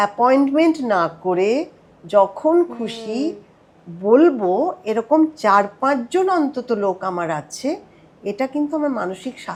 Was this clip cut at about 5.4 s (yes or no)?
no